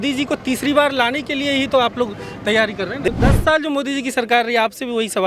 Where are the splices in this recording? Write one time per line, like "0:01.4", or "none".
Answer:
0:03.1

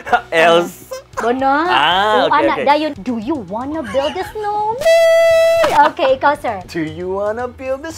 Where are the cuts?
0:02.9
0:06.6

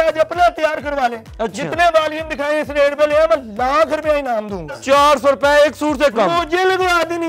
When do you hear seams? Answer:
0:04.8

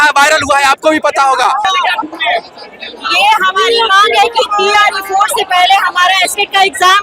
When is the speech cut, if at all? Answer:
0:01.6

